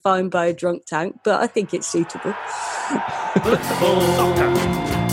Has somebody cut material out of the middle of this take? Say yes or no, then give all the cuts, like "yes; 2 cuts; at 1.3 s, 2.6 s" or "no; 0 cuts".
yes; 1 cut; at 3.4 s